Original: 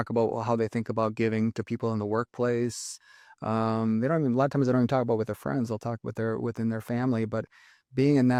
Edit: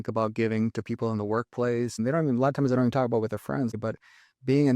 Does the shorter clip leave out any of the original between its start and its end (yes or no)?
yes